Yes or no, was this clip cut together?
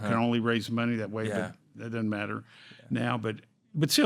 no